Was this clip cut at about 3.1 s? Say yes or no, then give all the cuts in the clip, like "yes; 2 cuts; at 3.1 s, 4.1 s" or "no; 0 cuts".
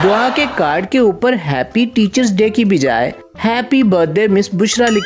no; 0 cuts